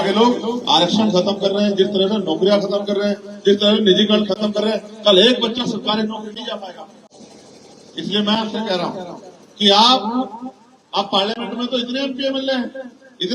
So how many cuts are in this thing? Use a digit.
0